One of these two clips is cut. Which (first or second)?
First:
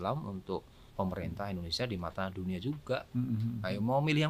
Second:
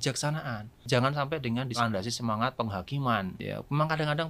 second